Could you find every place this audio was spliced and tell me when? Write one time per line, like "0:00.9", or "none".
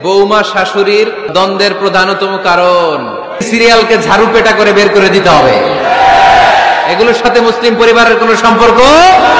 0:01.3
0:03.5